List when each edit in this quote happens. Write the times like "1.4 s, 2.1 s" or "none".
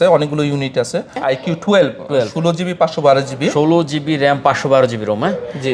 1.2 s